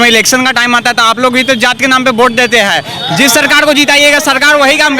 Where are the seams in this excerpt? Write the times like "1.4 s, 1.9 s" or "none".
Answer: none